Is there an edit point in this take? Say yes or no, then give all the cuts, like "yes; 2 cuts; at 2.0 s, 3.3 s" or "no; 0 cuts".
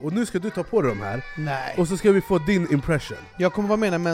yes; 1 cut; at 3.2 s